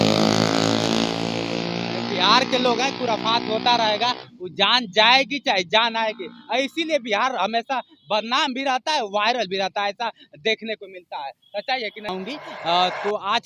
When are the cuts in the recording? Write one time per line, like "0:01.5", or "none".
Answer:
0:12.1